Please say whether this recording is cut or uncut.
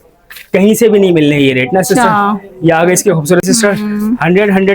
cut